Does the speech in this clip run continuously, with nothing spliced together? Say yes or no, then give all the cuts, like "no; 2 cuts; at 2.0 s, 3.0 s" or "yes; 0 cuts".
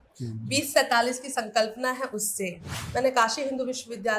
no; 1 cut; at 2.8 s